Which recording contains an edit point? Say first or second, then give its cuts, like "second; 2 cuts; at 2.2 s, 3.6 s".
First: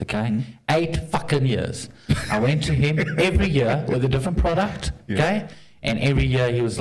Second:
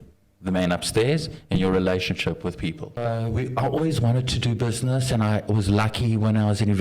second; 1 cut; at 3.0 s